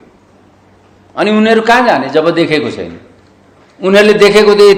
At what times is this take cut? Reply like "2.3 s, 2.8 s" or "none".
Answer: none

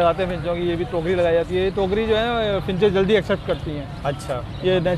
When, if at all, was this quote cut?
none

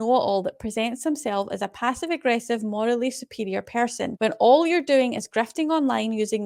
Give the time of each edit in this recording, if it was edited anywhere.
none

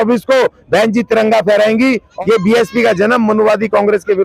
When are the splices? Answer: 2.1 s

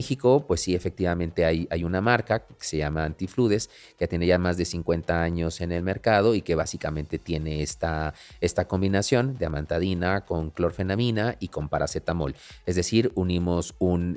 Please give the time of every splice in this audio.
none

